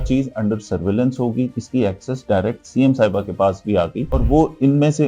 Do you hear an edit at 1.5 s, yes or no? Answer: yes